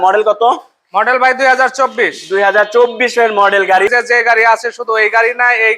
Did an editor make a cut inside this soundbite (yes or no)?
yes